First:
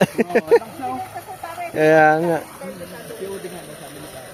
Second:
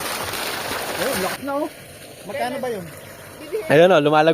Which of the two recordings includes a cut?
second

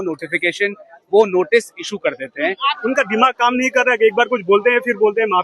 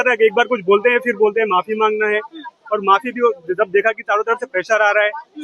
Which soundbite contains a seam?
first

